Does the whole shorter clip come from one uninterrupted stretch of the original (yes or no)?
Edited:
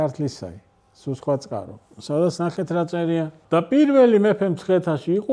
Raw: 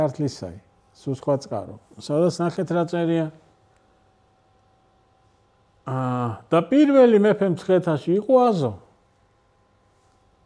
no